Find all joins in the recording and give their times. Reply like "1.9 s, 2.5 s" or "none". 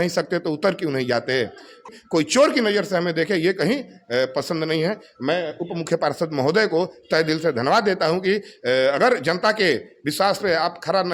1.9 s

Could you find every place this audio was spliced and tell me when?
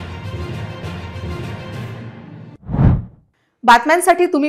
none

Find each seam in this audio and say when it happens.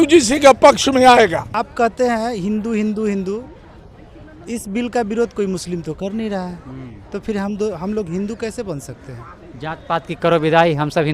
1.5 s

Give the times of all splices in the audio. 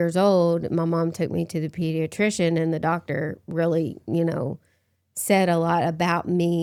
none

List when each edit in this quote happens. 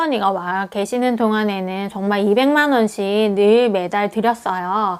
none

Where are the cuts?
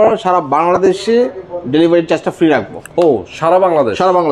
none

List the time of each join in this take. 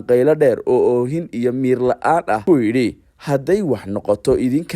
2.6 s

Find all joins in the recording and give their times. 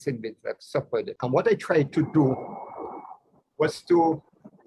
1.1 s

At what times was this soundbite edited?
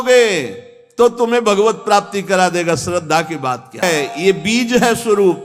3.8 s

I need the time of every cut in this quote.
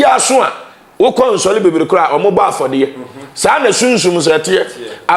none

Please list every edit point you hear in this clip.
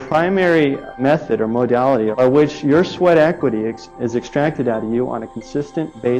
0.9 s, 2.1 s

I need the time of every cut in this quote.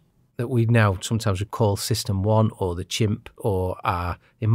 3.3 s

